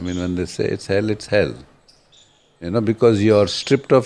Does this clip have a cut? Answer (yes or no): no